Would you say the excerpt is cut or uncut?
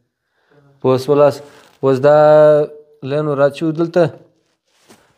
uncut